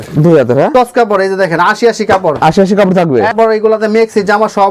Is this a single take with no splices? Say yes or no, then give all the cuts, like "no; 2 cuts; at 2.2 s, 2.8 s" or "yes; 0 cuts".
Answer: no; 2 cuts; at 0.7 s, 3.3 s